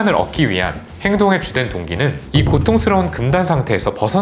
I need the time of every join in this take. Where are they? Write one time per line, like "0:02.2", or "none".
0:02.3